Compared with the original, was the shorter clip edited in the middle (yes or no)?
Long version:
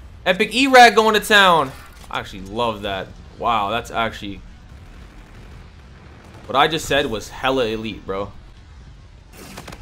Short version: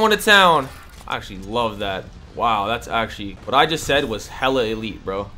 yes